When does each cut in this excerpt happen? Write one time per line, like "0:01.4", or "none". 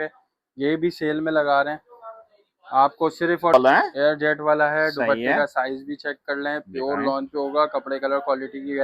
0:03.5